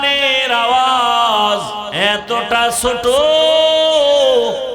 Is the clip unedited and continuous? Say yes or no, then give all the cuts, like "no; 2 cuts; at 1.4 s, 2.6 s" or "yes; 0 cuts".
yes; 0 cuts